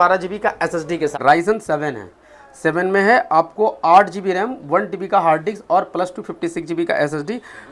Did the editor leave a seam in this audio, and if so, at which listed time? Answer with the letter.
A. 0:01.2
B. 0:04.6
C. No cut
A